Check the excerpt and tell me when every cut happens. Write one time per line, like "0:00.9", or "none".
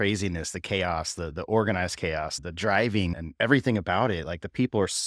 0:02.4
0:03.2